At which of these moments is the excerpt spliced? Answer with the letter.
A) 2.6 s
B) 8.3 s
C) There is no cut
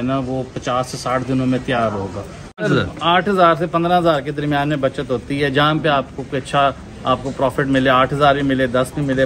A